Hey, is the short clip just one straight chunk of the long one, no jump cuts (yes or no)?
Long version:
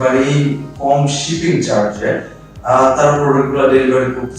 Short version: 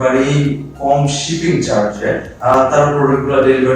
no